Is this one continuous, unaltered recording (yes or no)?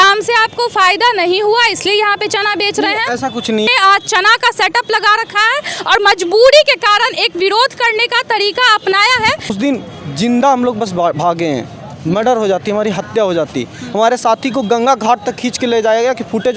no